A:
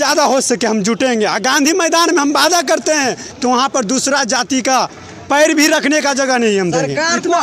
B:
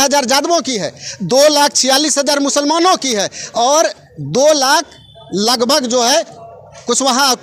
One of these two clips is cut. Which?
A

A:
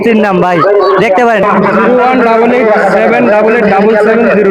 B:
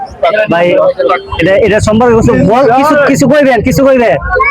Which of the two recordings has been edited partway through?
A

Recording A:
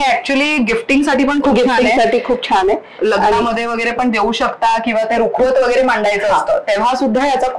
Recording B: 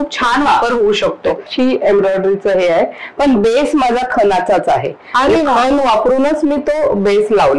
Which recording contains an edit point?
B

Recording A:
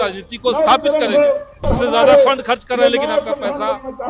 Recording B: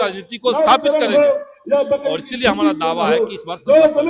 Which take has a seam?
A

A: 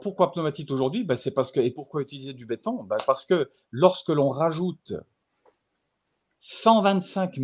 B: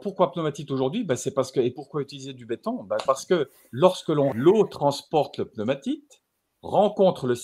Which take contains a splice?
B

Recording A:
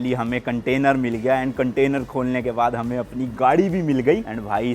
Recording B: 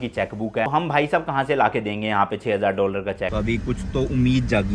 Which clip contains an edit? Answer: B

